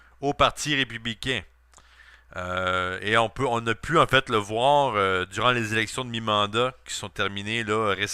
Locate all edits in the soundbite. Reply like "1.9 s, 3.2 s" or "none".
6.5 s